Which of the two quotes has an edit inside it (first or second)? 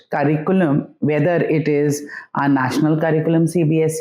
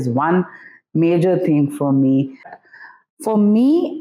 second